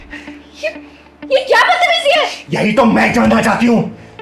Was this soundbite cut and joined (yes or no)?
no